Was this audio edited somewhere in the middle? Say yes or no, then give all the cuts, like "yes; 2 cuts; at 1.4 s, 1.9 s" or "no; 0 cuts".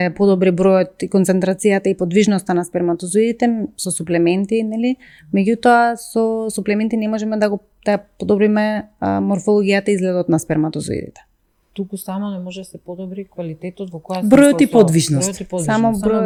no; 0 cuts